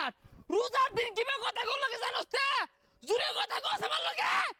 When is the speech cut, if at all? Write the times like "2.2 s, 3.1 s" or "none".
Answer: none